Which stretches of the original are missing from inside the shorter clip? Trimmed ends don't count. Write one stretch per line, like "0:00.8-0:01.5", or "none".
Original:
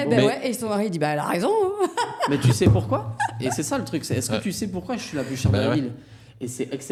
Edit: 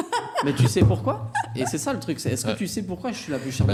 none